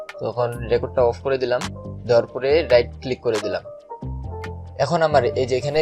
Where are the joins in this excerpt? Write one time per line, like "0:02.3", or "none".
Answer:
none